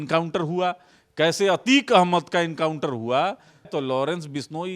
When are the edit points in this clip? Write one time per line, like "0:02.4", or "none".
0:03.7